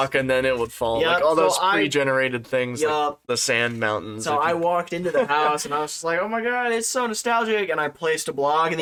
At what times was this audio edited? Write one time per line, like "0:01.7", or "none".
none